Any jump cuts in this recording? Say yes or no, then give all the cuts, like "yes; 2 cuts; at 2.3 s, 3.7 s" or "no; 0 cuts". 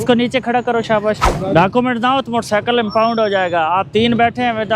yes; 1 cut; at 1.3 s